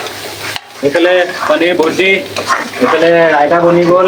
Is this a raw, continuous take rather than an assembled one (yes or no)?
yes